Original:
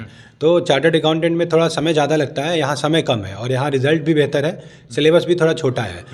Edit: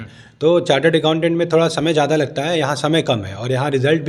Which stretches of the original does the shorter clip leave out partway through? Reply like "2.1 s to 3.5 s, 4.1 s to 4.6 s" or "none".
none